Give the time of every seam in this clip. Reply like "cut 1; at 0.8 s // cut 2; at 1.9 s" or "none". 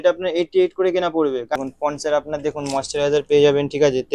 cut 1; at 1.6 s